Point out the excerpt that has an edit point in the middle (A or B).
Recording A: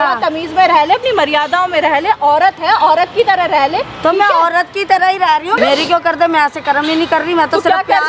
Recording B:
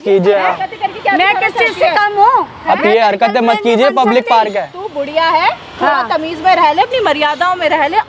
A